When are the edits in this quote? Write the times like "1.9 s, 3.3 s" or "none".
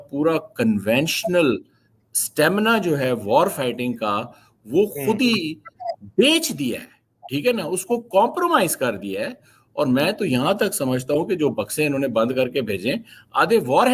none